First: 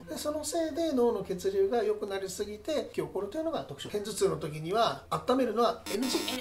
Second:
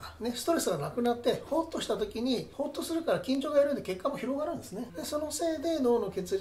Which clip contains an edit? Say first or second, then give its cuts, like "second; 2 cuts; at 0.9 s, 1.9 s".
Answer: first; 1 cut; at 3.9 s